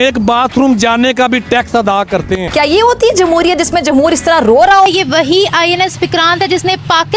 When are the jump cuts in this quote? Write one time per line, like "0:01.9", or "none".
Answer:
0:02.5
0:04.9